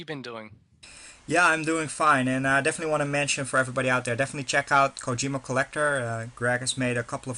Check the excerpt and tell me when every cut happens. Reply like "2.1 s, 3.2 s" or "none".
5.7 s